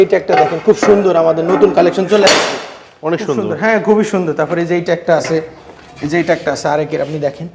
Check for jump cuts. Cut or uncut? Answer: uncut